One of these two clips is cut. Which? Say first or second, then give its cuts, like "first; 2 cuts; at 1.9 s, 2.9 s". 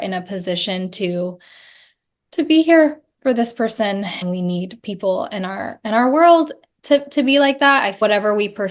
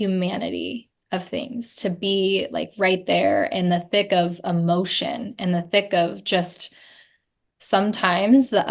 first; 2 cuts; at 4.2 s, 7.9 s